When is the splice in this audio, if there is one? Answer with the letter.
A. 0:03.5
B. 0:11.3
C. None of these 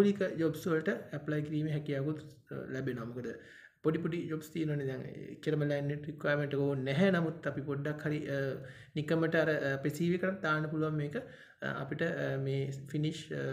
C